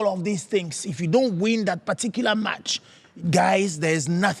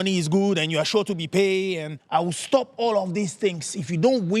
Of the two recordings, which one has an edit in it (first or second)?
second